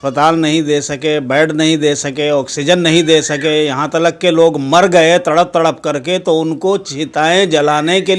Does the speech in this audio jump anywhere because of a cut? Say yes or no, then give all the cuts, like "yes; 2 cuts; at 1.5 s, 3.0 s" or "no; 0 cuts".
no; 0 cuts